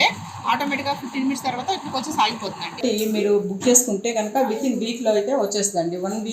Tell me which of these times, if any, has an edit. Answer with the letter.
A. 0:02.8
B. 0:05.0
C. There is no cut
A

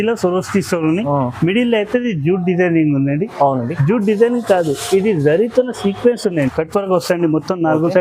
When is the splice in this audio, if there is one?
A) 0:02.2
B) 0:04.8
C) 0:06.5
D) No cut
C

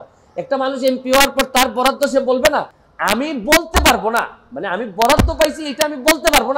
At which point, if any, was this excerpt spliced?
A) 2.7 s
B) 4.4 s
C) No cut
A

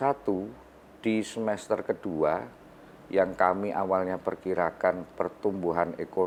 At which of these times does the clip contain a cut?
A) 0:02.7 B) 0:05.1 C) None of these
C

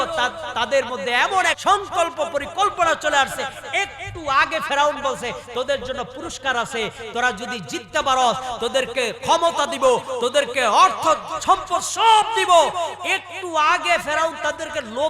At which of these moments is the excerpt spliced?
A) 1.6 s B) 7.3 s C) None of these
A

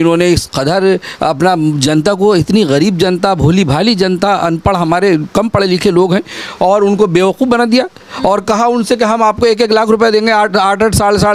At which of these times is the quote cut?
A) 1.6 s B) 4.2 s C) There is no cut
C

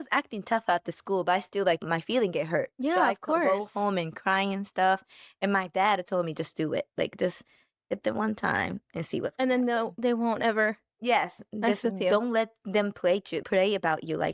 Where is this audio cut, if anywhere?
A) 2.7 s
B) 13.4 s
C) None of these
B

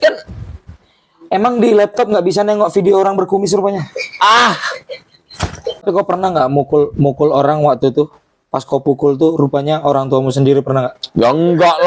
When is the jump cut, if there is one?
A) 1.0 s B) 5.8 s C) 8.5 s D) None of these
B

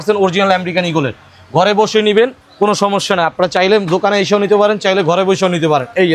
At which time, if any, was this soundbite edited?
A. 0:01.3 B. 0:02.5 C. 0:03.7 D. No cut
D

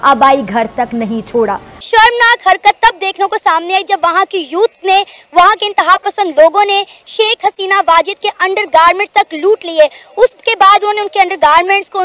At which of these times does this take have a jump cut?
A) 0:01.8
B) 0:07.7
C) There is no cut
A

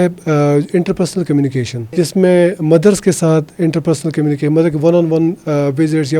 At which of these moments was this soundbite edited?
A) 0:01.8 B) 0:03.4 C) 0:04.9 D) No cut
A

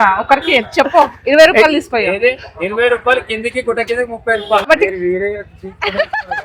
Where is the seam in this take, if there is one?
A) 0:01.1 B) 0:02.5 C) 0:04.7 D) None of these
C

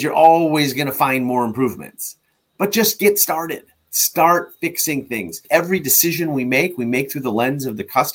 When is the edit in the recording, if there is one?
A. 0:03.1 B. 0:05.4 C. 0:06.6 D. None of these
B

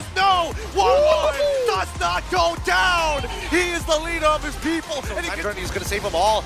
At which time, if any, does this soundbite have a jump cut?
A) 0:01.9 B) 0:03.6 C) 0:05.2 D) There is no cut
C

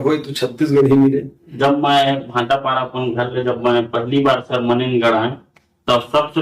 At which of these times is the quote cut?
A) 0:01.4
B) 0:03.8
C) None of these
A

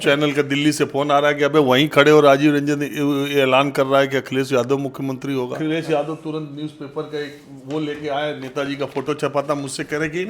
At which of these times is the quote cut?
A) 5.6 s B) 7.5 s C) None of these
A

